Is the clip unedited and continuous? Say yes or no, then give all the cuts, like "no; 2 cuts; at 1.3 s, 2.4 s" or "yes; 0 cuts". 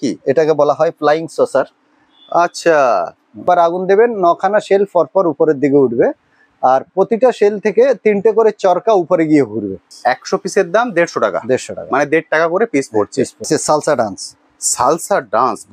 no; 3 cuts; at 3.4 s, 9.9 s, 13.5 s